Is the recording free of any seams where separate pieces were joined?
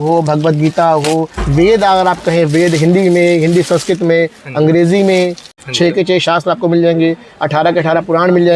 no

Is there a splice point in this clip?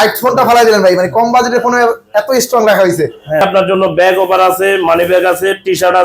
yes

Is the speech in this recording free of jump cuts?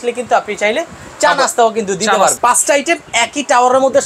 no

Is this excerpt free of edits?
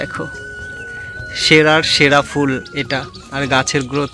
yes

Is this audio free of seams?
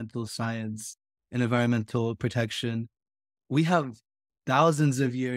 yes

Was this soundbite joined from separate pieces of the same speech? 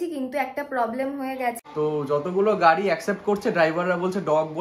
yes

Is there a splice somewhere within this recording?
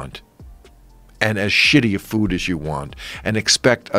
no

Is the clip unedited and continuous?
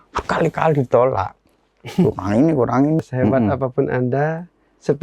no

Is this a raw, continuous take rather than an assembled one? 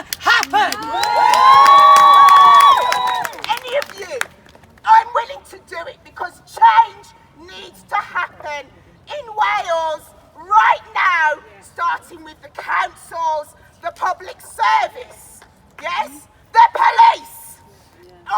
no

